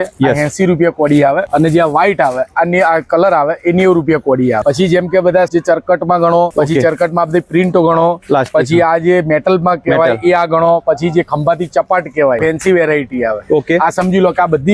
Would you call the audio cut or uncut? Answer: cut